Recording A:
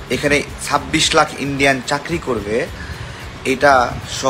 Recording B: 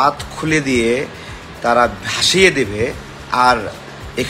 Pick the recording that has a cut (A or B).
B